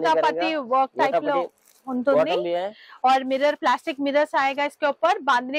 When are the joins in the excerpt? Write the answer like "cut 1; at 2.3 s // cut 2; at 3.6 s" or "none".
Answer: none